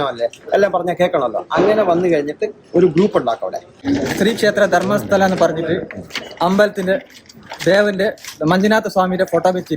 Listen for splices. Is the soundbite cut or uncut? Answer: cut